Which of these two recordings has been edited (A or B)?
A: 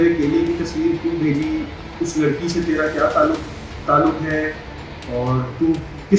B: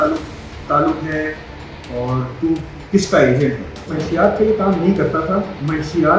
B